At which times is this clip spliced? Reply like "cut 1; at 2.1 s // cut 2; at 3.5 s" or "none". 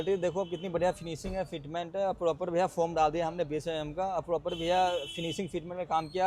none